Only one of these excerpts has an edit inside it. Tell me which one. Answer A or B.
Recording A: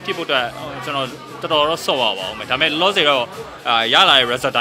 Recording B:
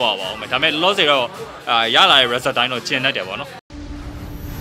B